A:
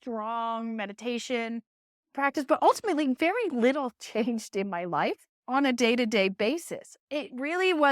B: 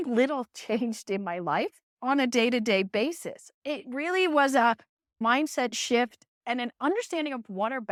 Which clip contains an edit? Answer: A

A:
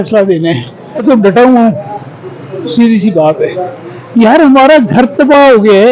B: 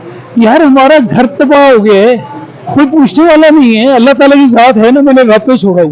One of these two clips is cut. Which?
A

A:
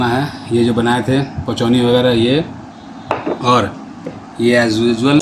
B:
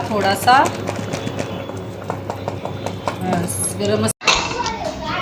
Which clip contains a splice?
B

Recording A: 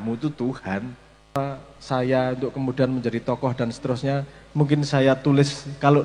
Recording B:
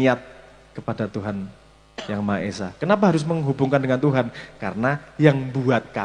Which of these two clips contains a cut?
A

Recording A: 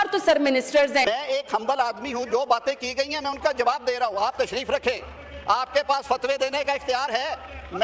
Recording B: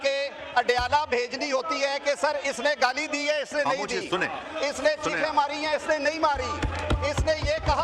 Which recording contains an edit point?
A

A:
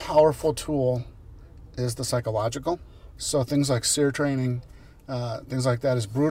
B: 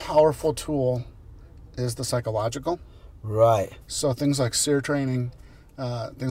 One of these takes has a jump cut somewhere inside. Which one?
A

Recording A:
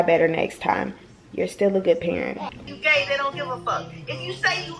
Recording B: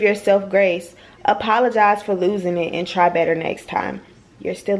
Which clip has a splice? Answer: A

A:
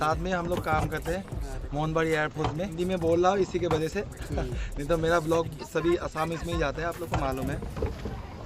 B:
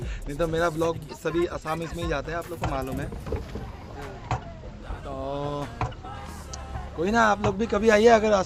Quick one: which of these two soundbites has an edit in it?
A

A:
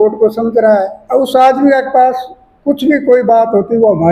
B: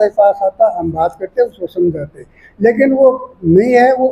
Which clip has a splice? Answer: A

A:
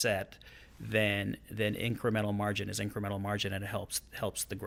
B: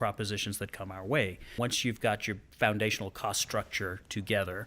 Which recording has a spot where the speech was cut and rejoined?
B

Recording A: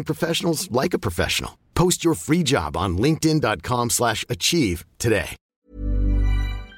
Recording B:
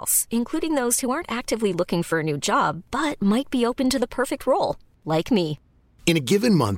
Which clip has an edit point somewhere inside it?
A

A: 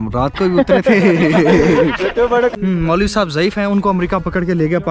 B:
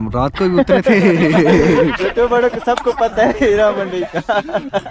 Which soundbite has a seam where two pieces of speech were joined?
A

